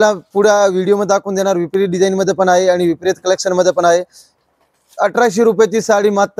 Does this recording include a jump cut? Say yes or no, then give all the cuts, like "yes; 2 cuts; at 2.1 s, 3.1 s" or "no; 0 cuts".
no; 0 cuts